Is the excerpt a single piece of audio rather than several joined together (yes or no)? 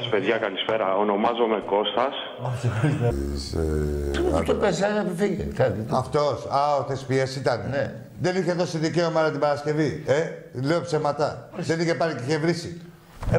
yes